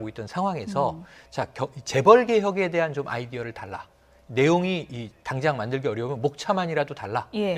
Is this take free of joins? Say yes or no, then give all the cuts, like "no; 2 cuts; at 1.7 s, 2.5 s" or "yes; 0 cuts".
no; 1 cut; at 5.7 s